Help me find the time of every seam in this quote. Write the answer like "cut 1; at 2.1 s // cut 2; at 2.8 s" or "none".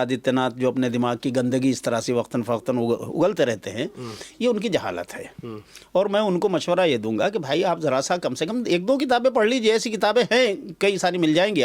none